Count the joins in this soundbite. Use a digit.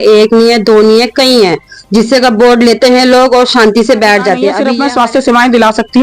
1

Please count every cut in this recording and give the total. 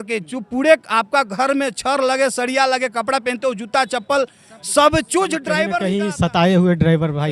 1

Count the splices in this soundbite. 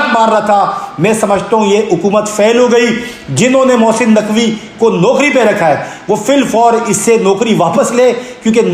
0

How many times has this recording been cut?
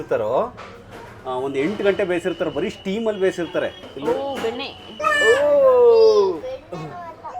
2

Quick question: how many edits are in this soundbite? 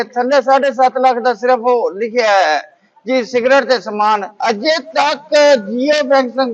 1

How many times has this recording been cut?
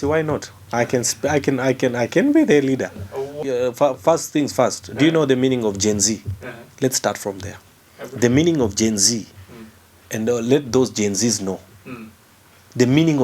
1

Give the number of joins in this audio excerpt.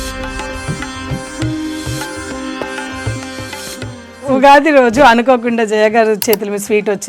1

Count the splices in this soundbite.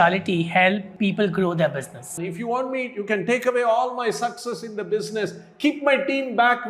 2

